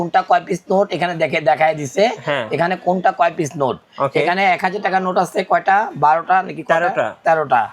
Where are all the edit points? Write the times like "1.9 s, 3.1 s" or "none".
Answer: none